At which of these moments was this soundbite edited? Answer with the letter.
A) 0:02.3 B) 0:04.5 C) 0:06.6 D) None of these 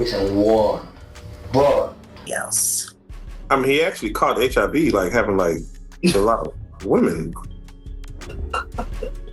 A